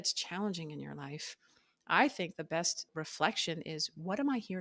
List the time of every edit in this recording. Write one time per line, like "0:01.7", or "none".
0:02.9